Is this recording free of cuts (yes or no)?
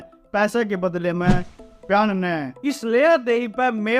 yes